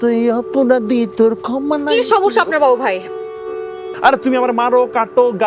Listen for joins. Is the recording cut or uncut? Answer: cut